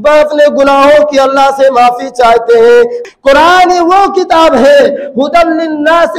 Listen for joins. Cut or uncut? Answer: cut